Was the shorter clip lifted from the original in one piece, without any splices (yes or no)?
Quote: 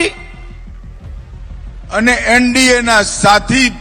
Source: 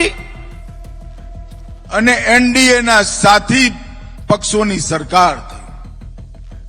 yes